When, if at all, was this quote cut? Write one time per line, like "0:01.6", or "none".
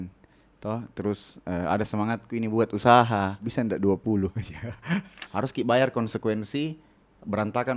0:03.4
0:05.2